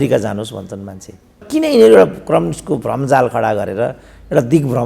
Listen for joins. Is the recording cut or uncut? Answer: cut